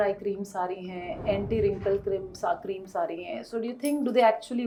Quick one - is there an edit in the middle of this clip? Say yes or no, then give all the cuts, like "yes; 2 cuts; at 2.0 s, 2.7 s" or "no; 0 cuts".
no; 0 cuts